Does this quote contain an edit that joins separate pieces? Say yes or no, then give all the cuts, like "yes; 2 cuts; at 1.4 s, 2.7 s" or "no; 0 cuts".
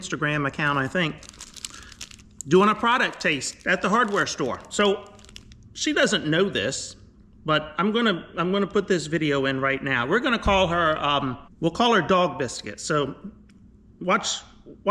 yes; 1 cut; at 11.4 s